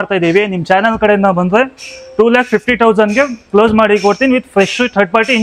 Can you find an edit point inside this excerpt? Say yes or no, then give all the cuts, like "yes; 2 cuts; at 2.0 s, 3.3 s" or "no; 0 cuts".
no; 0 cuts